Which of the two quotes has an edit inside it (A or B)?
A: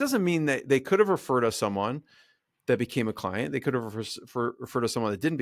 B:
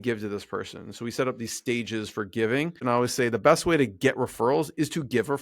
B